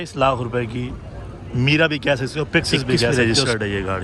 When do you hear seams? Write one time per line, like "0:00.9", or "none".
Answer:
0:03.1